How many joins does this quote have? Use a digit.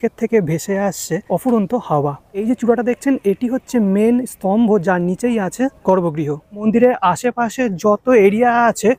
4